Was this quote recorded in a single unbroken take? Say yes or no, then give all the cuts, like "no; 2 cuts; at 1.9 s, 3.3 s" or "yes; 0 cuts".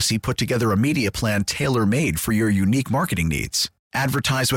yes; 0 cuts